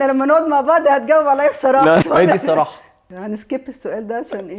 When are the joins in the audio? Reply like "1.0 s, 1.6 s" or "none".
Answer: 2.1 s, 3.2 s